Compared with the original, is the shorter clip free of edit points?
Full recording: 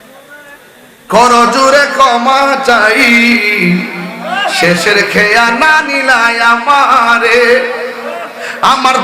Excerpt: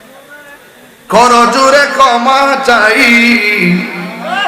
yes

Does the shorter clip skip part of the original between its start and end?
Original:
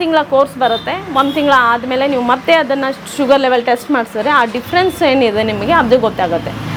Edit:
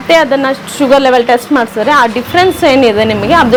no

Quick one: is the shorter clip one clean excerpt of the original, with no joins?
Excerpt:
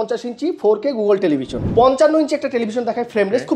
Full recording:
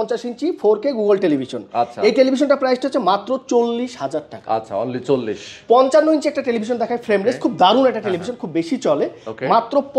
no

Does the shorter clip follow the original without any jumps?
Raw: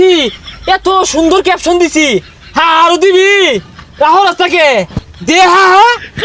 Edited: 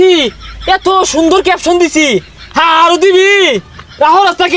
yes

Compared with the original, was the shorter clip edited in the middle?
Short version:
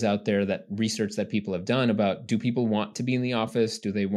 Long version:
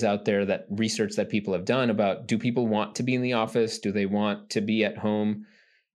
no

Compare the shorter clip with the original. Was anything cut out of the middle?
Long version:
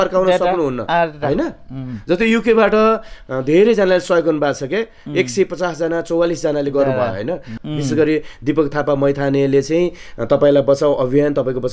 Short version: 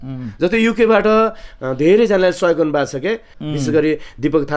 yes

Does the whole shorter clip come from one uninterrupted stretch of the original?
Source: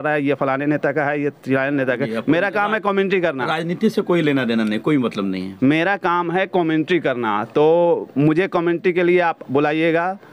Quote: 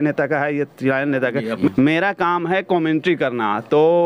no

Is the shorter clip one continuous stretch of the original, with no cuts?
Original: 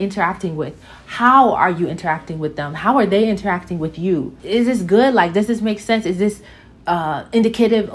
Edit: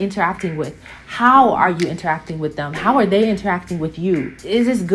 yes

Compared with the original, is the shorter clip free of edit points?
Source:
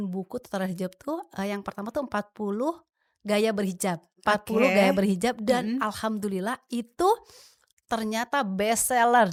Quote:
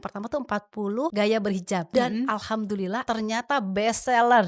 no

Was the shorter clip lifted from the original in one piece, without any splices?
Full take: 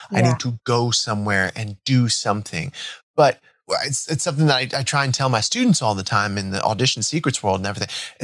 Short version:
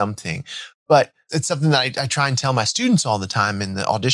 no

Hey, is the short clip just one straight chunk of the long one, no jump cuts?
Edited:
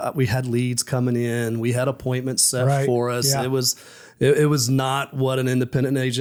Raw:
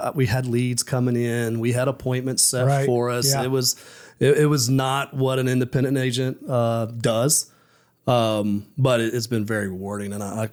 yes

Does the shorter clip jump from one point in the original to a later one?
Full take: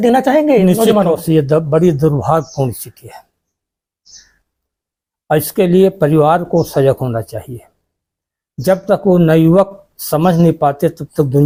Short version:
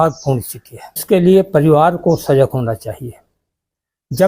yes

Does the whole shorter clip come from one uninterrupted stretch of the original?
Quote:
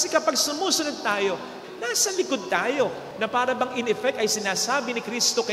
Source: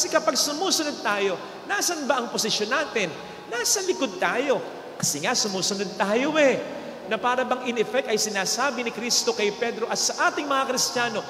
no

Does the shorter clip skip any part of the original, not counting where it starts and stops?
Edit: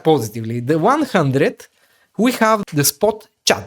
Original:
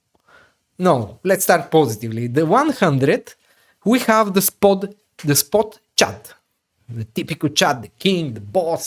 yes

